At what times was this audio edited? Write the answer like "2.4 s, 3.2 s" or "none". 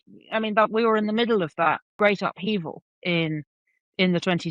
1.9 s